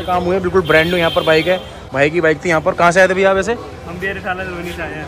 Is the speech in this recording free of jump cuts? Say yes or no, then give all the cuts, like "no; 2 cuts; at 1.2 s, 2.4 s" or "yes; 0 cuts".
yes; 0 cuts